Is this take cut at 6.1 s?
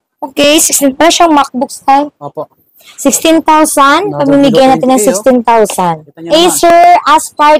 yes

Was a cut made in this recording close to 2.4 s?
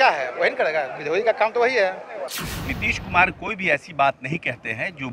yes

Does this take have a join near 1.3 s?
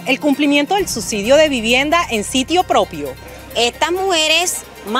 no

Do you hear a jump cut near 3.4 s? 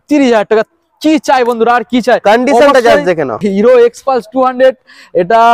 yes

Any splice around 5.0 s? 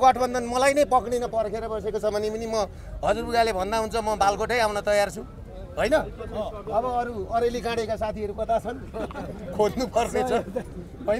no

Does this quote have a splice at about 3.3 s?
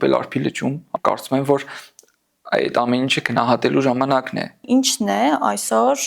no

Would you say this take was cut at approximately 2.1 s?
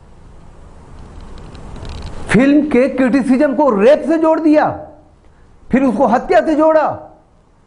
no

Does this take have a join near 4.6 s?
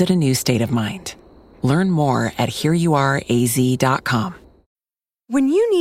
yes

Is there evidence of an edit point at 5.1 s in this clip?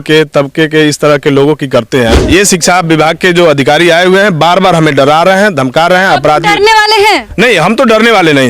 no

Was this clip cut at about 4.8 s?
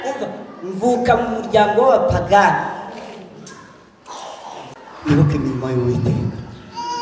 yes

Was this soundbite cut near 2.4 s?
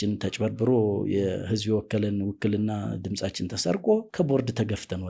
no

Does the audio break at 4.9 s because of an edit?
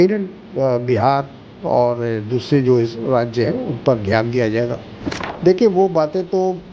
yes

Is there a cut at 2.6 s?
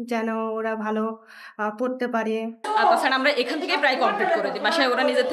yes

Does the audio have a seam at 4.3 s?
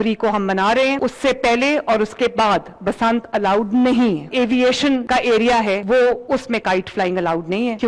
yes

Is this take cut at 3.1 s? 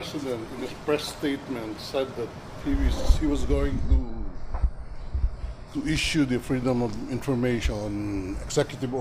no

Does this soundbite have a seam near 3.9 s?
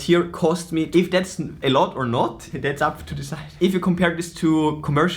no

